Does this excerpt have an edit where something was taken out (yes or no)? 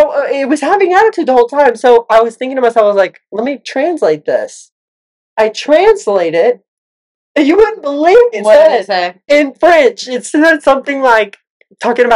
yes